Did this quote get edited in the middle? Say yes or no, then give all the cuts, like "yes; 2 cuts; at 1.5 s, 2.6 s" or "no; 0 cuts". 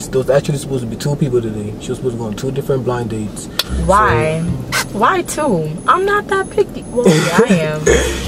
no; 0 cuts